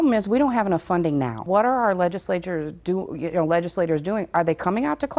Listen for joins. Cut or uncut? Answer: cut